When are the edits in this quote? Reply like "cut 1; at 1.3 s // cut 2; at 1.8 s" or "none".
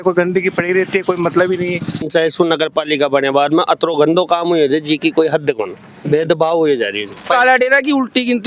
cut 1; at 2.0 s // cut 2; at 7.2 s

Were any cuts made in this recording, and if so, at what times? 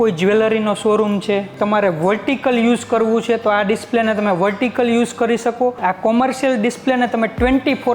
cut 1; at 1.5 s // cut 2; at 5.8 s

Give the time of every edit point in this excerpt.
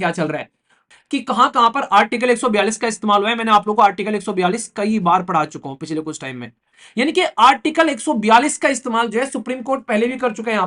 cut 1; at 0.8 s // cut 2; at 6.8 s

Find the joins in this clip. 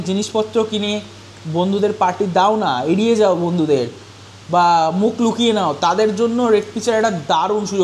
none

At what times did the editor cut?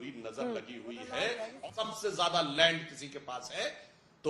cut 1; at 1.7 s

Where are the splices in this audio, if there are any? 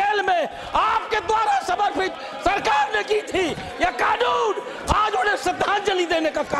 none

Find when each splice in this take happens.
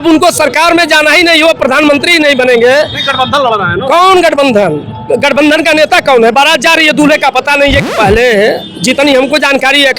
cut 1; at 7.9 s

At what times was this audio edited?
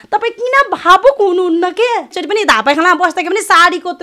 cut 1; at 2.2 s

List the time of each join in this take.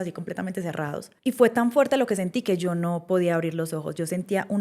cut 1; at 1.1 s

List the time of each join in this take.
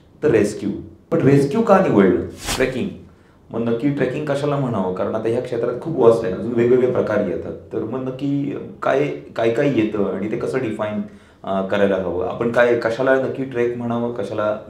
cut 1; at 1.1 s // cut 2; at 2.5 s

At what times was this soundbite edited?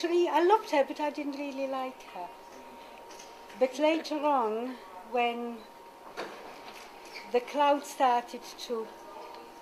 none

